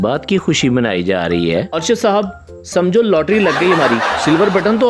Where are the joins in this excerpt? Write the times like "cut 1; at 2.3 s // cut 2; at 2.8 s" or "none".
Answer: cut 1; at 1.7 s // cut 2; at 4.1 s